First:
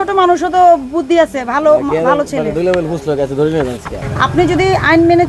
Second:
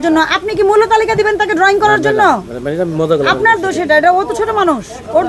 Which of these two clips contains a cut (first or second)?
first